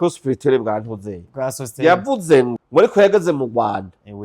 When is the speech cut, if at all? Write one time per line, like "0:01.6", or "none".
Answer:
0:02.5